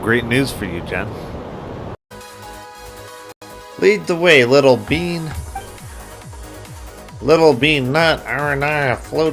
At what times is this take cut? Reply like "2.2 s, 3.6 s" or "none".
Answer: 2.0 s, 3.6 s